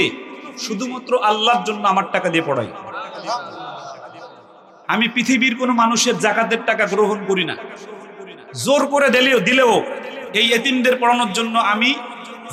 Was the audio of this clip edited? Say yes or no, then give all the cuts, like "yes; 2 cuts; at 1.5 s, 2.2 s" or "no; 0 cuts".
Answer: no; 0 cuts